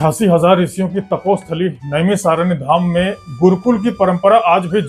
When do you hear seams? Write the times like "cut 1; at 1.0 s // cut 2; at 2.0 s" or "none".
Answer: none

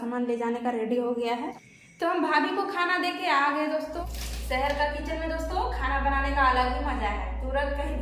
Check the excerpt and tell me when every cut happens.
cut 1; at 1.5 s // cut 2; at 3.9 s

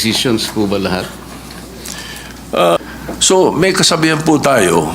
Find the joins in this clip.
cut 1; at 2.8 s

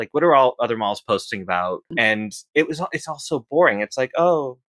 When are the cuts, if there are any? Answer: cut 1; at 1.9 s

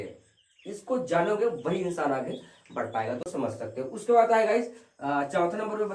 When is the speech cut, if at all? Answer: cut 1; at 3.2 s

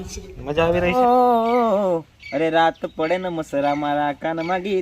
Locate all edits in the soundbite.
cut 1; at 0.9 s

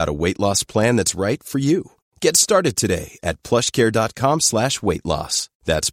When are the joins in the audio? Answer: none

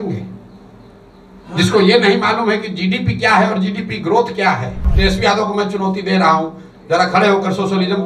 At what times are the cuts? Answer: cut 1; at 4.9 s

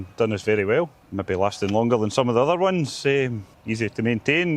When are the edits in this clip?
cut 1; at 1.0 s // cut 2; at 3.4 s

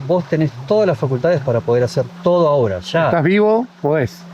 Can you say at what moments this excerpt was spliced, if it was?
none

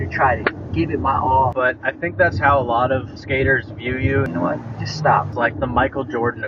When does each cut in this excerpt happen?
cut 1; at 1.5 s // cut 2; at 4.3 s // cut 3; at 5.3 s

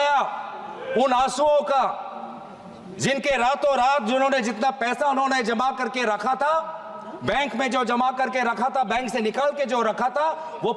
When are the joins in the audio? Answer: none

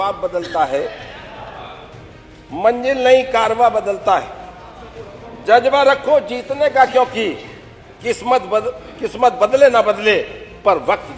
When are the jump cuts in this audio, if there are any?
none

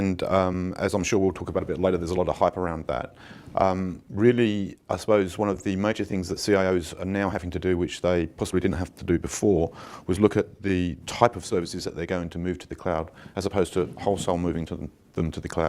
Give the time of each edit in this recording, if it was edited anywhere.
cut 1; at 5.8 s

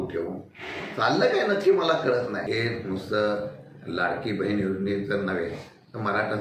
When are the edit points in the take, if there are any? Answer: cut 1; at 2.4 s

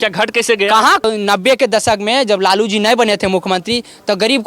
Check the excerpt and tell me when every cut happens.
cut 1; at 1.0 s

